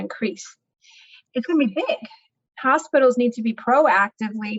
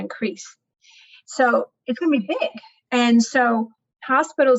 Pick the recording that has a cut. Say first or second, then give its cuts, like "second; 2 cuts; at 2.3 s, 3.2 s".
first; 2 cuts; at 1.2 s, 2.3 s